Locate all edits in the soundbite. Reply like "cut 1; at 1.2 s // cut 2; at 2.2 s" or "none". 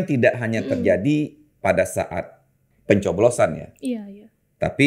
none